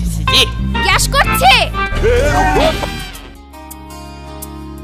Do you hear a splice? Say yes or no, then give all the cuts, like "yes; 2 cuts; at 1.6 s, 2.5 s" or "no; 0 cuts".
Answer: no; 0 cuts